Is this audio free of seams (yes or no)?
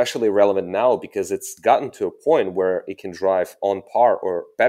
no